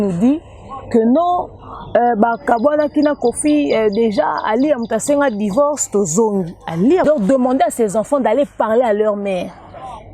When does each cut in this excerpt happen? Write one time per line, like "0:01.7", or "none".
0:07.0

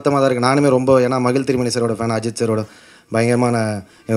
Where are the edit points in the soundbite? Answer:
none

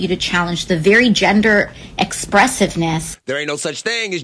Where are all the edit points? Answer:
none

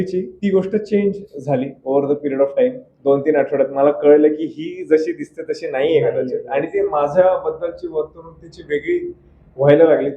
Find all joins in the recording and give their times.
none

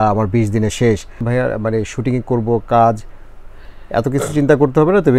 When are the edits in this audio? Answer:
0:01.2

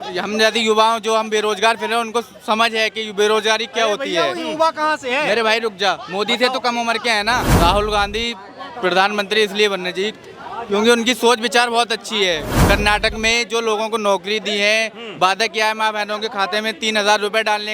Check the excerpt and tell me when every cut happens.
0:07.5
0:12.5

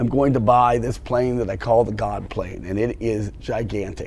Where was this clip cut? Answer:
none

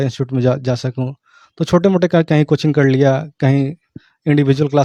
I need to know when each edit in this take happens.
none

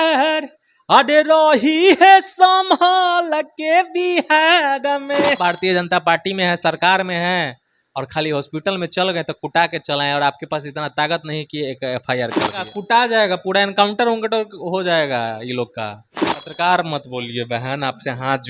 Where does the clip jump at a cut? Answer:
0:05.5
0:12.8
0:16.4

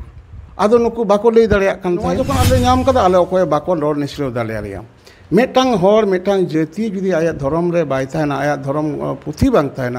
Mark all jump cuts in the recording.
0:02.3

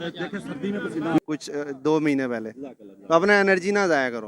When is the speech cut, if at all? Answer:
0:01.2

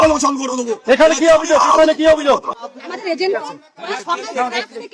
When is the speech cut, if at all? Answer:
0:02.5

